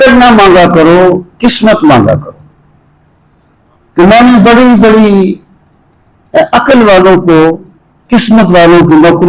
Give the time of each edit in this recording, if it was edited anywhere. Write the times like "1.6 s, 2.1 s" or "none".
none